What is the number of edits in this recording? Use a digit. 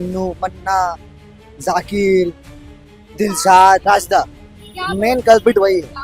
1